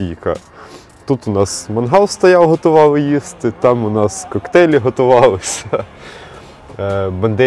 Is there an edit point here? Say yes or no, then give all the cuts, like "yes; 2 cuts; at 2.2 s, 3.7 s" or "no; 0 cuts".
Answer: no; 0 cuts